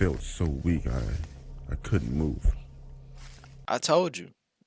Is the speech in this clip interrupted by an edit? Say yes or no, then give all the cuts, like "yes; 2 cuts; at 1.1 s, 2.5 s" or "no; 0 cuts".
no; 0 cuts